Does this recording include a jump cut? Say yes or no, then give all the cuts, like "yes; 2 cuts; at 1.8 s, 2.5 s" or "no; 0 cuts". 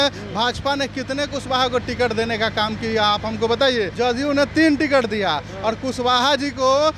yes; 1 cut; at 3.9 s